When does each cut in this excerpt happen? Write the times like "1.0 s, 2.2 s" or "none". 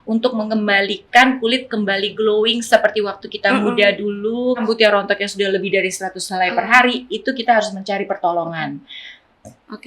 4.7 s

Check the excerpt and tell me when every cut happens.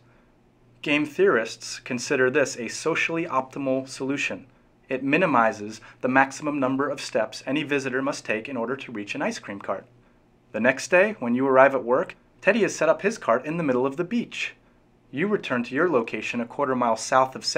15.1 s

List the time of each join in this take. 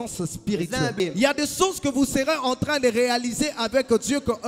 1.0 s

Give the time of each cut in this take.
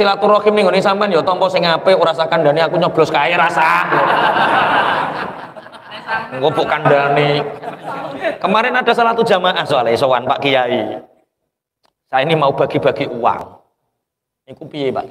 none

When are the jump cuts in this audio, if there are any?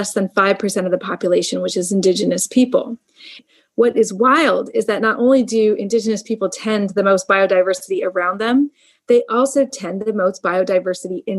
3.4 s

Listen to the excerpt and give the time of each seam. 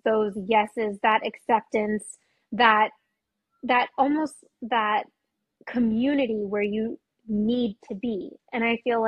none

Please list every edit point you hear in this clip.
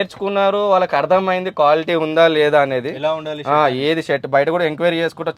none

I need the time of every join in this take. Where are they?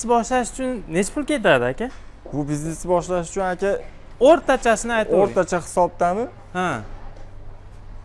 none

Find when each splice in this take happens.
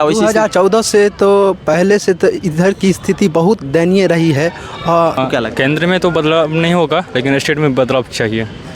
5.2 s

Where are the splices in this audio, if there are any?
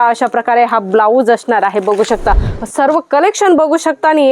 2.5 s

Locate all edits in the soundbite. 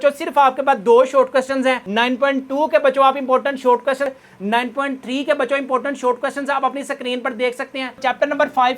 4.1 s, 8.0 s

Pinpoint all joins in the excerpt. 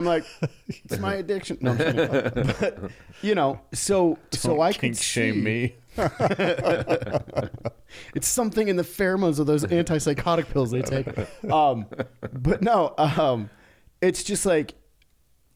none

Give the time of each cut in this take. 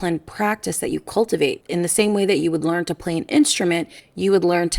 1.6 s

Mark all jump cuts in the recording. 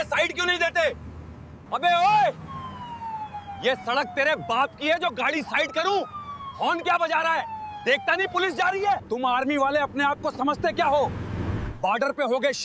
9.0 s

